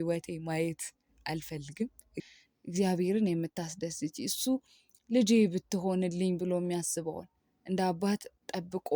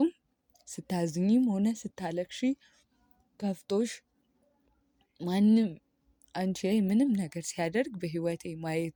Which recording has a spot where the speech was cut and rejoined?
first; 1 cut; at 2.2 s

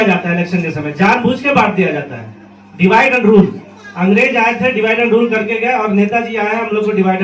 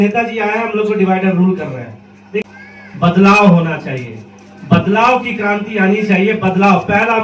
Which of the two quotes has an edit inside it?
second; 1 cut; at 2.4 s

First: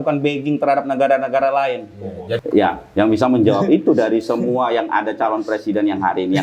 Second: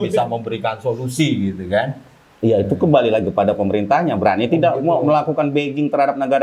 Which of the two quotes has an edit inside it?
first; 1 cut; at 2.4 s

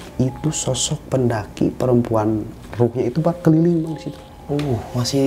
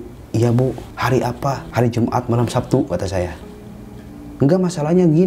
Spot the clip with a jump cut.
second; 3 cuts; at 0.9 s, 1.6 s, 3.5 s

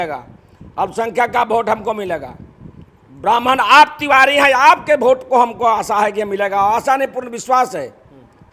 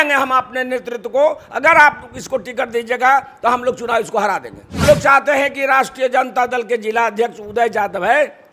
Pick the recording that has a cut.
second; 1 cut; at 4.8 s

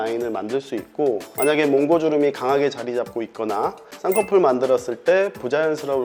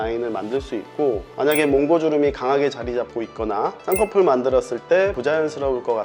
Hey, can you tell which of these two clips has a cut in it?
second; 2 cuts; at 3.8 s, 5.2 s

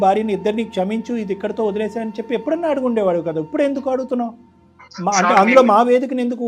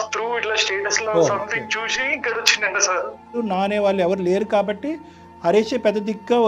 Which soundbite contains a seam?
second; 1 cut; at 3.4 s

